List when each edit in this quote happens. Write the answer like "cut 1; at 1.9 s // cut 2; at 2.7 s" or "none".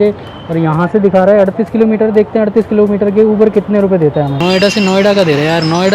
cut 1; at 4.4 s

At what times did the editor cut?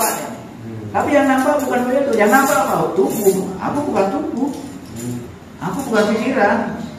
cut 1; at 5.4 s

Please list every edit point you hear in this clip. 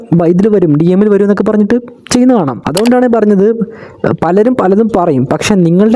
cut 1; at 2.6 s

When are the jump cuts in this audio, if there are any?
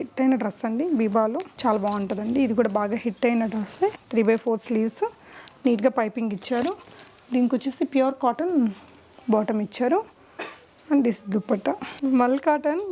cut 1; at 1.5 s // cut 2; at 4.0 s // cut 3; at 11.9 s

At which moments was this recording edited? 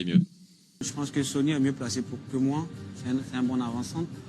cut 1; at 0.9 s

